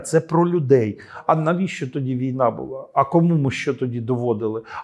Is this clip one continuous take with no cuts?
no; 1 cut; at 1.1 s

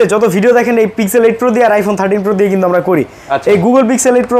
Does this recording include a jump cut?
no; 0 cuts

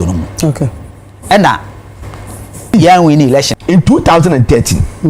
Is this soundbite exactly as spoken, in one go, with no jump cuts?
no; 1 cut; at 3.5 s

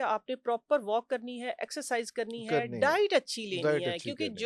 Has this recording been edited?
no; 0 cuts

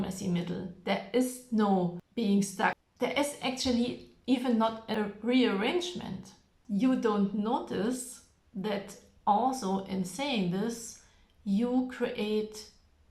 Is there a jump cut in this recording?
yes; 4 cuts; at 2.0 s, 2.8 s, 4.9 s, 6.5 s

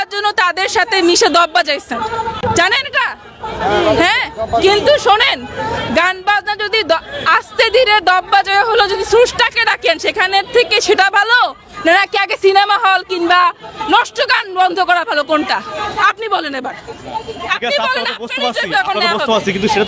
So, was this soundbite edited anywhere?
no; 0 cuts

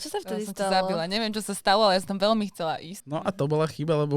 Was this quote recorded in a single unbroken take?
no; 1 cut; at 3.0 s

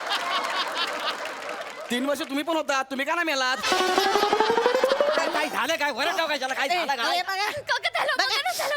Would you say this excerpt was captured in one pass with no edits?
no; 1 cut; at 5.4 s

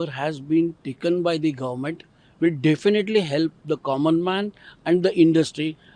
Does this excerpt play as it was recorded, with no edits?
yes; 0 cuts

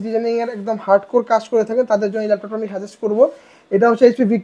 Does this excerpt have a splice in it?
no; 0 cuts

